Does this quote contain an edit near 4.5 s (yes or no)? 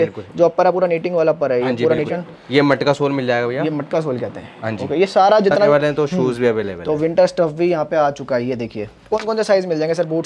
no